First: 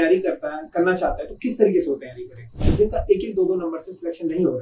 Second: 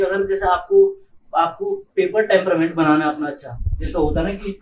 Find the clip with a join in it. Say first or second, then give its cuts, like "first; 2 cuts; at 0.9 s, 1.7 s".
first; 1 cut; at 2.6 s